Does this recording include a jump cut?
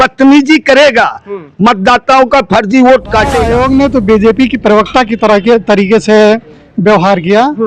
yes; 1 cut; at 3.4 s

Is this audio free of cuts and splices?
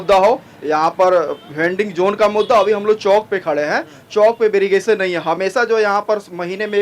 yes; 0 cuts

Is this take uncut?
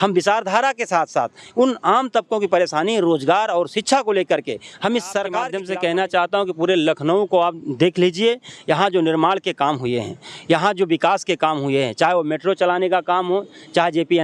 no; 1 cut; at 5.5 s

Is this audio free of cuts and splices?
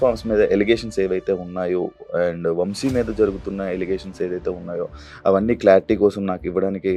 yes; 0 cuts

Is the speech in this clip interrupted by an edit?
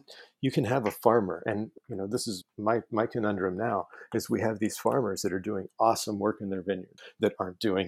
no; 0 cuts

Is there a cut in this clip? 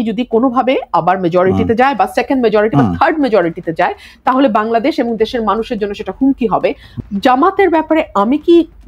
yes; 1 cut; at 6.9 s

